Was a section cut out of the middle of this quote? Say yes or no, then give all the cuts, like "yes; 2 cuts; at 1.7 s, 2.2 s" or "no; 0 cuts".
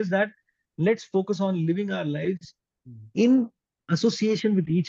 no; 0 cuts